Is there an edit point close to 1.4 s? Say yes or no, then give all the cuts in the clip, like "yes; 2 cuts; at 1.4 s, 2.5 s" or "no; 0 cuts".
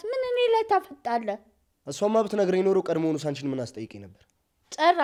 no; 0 cuts